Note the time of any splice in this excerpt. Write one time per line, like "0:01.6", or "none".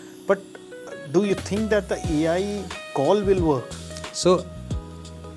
none